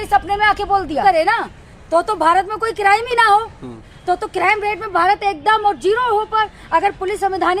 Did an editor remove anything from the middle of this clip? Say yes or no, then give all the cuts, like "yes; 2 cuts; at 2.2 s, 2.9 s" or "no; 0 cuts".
yes; 1 cut; at 1.0 s